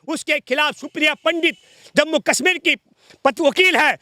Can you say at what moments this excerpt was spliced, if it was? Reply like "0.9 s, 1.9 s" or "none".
none